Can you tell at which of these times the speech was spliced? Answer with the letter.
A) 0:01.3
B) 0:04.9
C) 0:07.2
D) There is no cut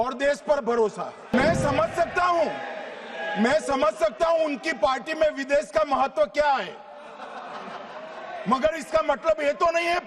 A